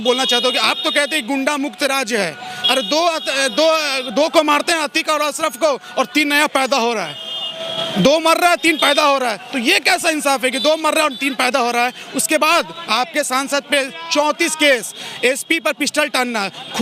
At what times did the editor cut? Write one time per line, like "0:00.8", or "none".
none